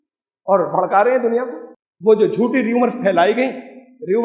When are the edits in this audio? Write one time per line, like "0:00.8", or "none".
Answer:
0:01.6

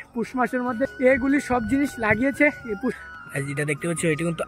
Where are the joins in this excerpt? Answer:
0:00.9
0:03.0

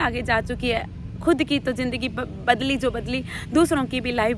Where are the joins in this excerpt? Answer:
none

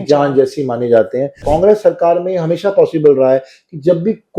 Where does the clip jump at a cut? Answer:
0:01.4

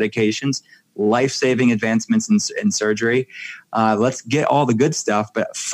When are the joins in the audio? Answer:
none

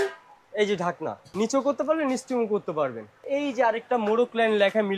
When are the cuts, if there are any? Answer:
0:01.2
0:03.2

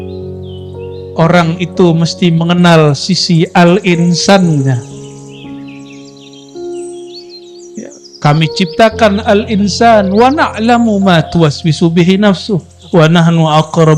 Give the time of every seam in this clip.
none

